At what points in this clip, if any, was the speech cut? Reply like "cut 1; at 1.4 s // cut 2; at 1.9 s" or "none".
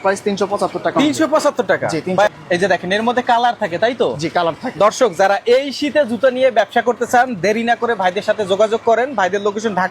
cut 1; at 2.3 s

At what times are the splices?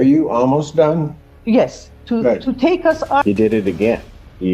cut 1; at 3.2 s

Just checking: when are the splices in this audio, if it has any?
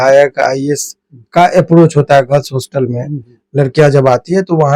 none

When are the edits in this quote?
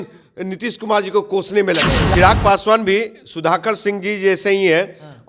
cut 1; at 2.0 s

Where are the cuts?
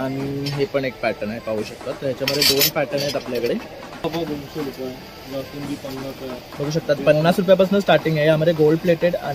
cut 1; at 4.0 s

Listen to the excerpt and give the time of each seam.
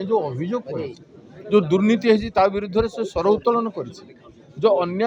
none

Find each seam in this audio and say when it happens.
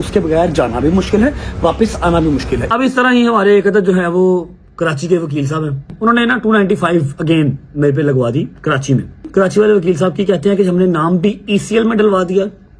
cut 1; at 2.6 s // cut 2; at 5.9 s // cut 3; at 9.3 s

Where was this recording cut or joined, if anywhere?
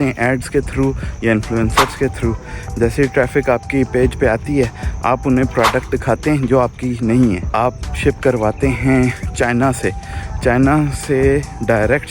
cut 1; at 7.4 s // cut 2; at 9.2 s

